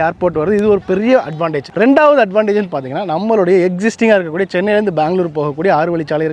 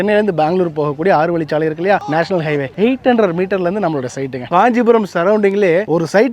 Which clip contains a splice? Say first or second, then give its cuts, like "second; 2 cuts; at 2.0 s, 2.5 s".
second; 1 cut; at 4.5 s